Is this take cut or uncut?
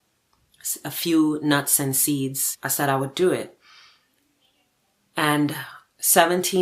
cut